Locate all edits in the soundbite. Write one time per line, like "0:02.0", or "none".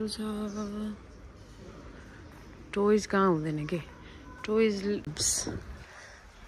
0:05.1